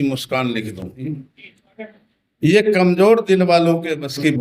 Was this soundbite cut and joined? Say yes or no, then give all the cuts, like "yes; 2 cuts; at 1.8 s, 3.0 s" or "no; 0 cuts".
yes; 1 cut; at 1.0 s